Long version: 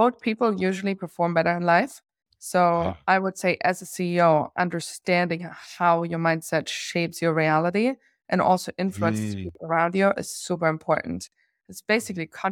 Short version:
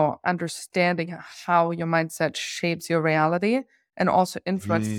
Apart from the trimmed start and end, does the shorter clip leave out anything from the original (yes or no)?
no